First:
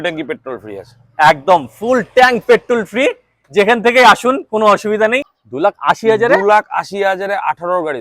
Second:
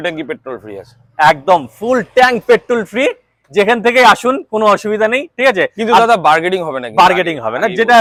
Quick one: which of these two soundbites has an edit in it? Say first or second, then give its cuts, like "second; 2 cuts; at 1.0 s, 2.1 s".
first; 1 cut; at 5.3 s